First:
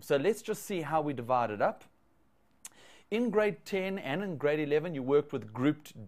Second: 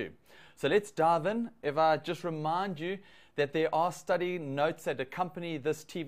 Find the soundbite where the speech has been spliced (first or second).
first